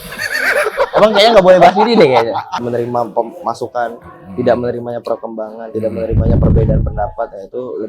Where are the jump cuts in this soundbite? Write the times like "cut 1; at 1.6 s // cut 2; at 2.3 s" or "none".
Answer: cut 1; at 2.6 s